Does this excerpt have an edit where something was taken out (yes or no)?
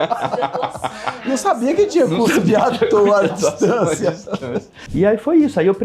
yes